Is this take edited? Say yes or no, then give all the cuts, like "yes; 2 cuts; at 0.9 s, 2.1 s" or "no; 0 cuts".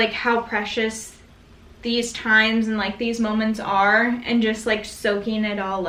no; 0 cuts